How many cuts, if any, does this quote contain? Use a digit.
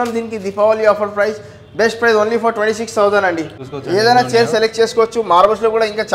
1